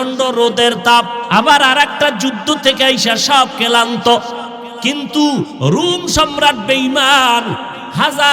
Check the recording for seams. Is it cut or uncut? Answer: cut